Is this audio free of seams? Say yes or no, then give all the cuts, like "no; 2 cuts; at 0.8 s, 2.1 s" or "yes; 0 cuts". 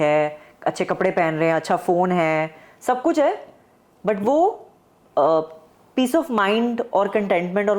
yes; 0 cuts